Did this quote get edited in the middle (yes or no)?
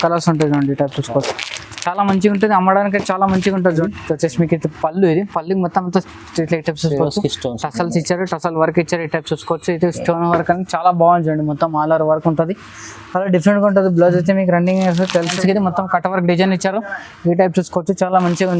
yes